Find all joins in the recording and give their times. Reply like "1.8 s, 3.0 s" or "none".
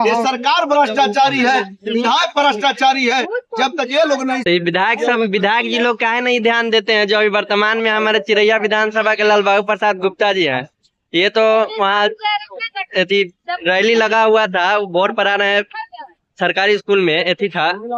4.4 s